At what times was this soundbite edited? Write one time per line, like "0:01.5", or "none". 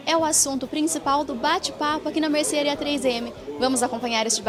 none